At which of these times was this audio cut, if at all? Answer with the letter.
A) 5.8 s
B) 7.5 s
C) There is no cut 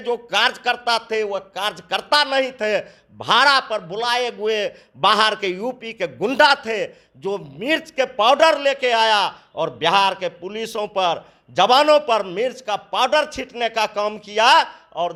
C